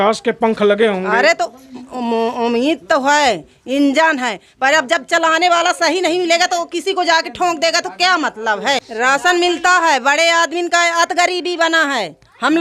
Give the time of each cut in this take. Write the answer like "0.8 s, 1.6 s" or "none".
8.9 s